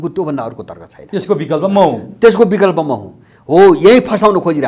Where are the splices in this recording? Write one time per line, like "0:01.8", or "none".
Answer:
none